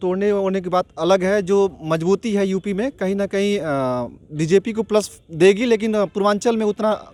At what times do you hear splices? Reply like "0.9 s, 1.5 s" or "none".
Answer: none